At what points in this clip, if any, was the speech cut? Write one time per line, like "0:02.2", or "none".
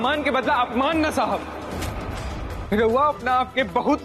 none